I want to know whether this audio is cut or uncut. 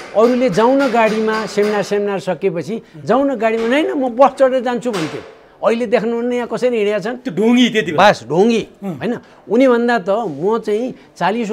uncut